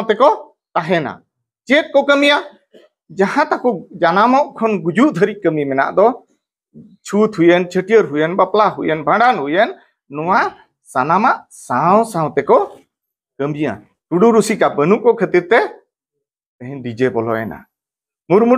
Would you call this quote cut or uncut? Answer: cut